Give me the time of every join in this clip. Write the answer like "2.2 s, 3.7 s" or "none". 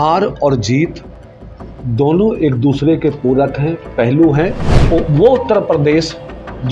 4.7 s